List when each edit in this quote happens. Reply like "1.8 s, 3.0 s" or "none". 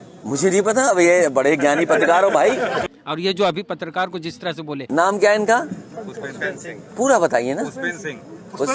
2.8 s, 4.9 s